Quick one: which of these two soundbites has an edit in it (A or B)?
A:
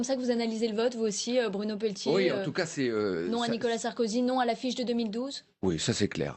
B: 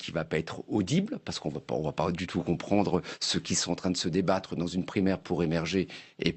A